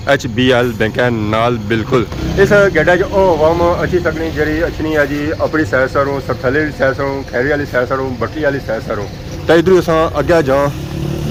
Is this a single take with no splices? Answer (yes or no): yes